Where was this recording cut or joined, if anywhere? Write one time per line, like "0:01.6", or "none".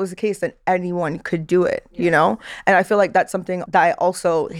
0:03.6

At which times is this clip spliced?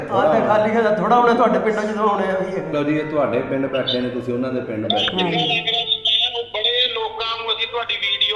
0:02.7

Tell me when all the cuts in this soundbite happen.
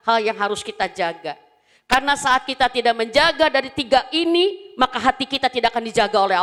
none

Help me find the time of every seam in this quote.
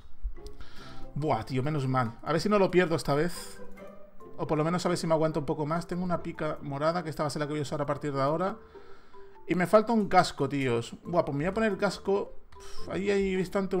none

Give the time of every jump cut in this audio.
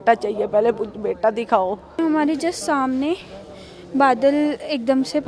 0:02.0

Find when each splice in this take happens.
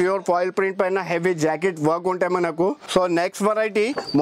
0:02.8

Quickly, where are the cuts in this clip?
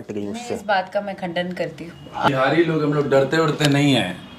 0:02.3

